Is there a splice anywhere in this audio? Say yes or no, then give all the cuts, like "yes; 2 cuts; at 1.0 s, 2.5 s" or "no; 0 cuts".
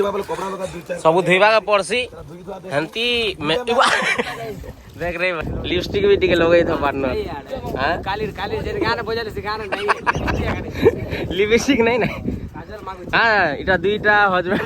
yes; 1 cut; at 5.4 s